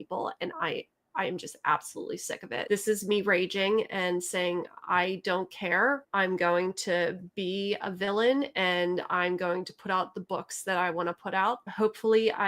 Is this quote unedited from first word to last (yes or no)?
no